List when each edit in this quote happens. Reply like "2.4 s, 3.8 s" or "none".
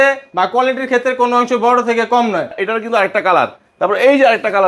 2.6 s